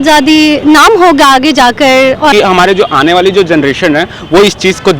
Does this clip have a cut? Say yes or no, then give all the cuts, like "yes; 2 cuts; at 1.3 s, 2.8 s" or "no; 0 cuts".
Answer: yes; 1 cut; at 2.3 s